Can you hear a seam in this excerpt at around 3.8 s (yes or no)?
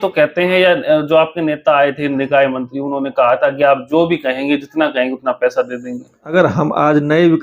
no